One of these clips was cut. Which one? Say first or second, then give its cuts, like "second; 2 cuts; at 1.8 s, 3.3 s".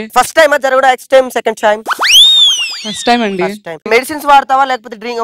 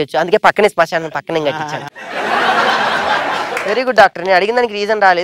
first; 1 cut; at 3.8 s